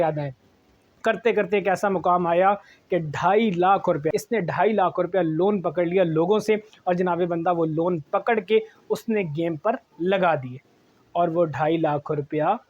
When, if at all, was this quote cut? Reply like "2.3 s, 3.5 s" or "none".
4.0 s